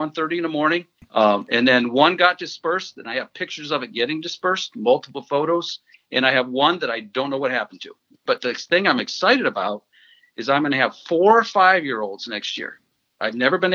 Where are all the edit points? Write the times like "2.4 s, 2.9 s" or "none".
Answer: 1.0 s, 8.2 s